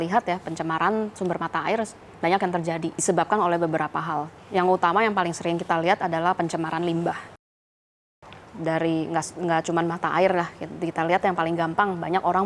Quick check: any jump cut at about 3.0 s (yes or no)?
yes